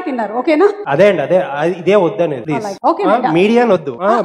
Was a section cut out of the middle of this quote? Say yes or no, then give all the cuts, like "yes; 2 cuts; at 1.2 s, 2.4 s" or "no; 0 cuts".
no; 0 cuts